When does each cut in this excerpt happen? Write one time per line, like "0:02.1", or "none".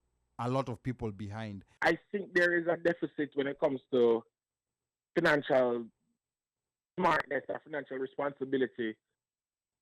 0:01.7